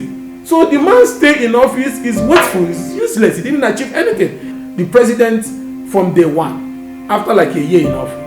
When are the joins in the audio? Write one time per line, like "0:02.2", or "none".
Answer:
0:04.4